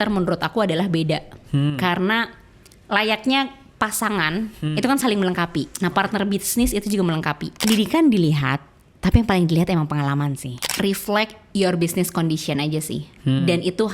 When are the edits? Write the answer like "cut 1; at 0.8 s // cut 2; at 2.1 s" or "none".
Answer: cut 1; at 7.6 s // cut 2; at 10.7 s